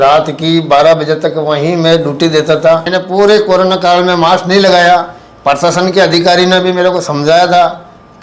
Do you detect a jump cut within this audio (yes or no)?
yes